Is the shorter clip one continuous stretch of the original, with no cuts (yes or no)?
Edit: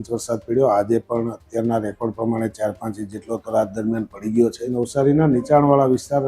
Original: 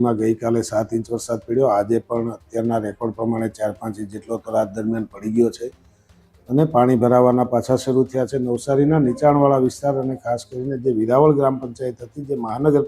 no